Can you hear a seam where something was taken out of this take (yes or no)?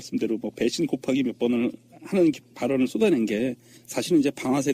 no